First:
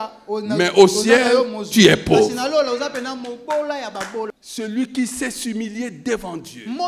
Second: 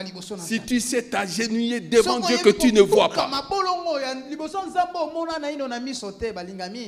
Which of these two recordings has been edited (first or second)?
first